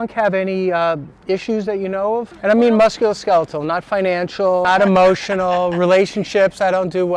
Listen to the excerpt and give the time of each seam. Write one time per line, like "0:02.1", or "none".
0:02.3
0:04.7